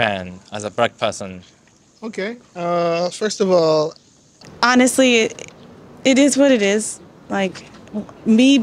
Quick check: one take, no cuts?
no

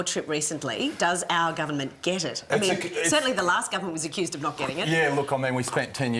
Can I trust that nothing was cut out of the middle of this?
yes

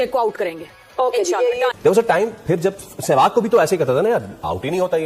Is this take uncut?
no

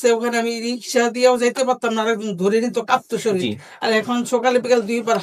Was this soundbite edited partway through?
no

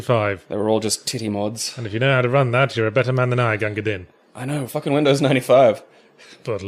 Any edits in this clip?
yes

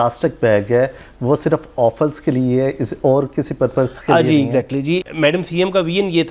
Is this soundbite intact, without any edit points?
no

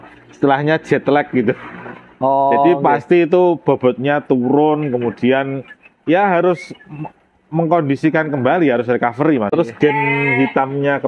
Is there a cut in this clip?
yes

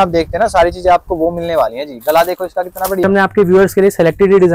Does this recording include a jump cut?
yes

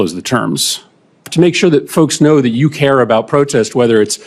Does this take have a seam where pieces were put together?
yes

